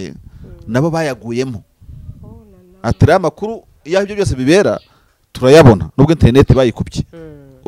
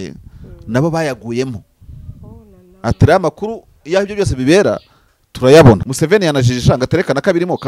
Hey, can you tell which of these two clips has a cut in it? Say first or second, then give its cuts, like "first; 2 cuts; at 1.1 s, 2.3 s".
second; 1 cut; at 5.9 s